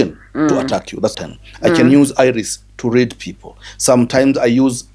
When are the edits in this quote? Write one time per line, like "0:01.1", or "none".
0:01.1